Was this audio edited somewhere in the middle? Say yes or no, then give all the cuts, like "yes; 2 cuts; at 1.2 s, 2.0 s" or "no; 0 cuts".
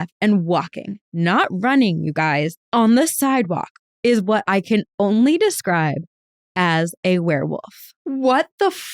no; 0 cuts